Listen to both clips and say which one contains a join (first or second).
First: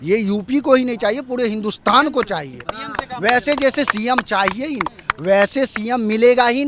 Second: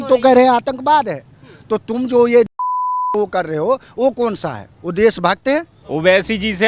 second